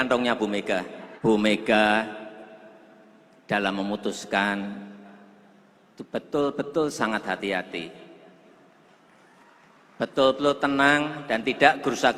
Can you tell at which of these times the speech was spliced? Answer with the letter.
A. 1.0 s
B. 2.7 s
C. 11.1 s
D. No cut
A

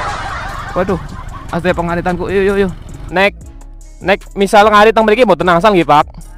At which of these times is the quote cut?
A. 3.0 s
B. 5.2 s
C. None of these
A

